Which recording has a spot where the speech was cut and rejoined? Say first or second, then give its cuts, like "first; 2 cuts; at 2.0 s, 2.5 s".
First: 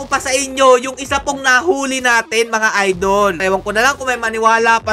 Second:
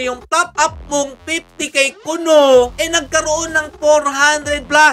first; 1 cut; at 3.4 s